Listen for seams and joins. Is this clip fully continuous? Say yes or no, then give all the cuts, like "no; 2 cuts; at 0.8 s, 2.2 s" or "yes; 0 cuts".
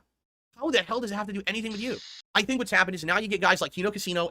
no; 1 cut; at 2.1 s